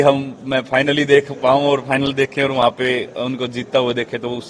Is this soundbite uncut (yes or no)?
yes